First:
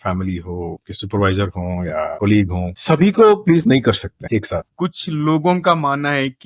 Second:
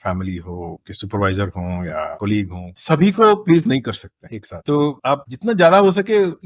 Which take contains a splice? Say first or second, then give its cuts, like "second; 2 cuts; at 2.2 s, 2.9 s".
first; 1 cut; at 4.6 s